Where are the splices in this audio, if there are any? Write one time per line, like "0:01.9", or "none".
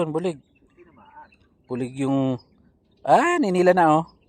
none